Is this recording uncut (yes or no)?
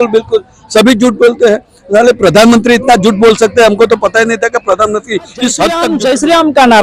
no